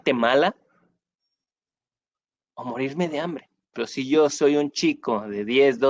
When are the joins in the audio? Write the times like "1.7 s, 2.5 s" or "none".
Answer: 3.8 s